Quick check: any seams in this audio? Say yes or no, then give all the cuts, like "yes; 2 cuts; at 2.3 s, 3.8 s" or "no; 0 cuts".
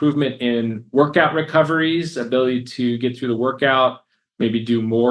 no; 0 cuts